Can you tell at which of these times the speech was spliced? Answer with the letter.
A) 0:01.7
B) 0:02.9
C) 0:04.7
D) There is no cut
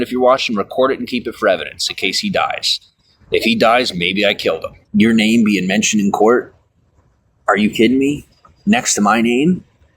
C